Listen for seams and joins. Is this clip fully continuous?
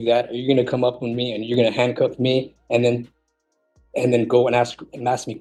yes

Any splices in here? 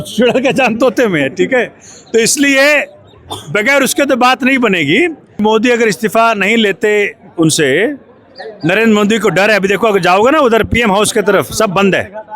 yes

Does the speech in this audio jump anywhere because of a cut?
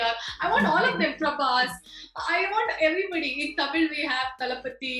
no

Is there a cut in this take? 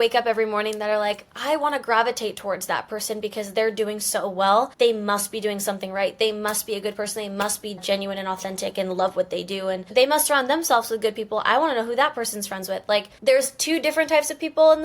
yes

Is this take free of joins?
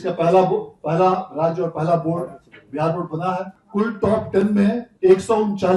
no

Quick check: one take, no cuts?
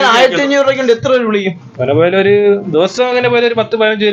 yes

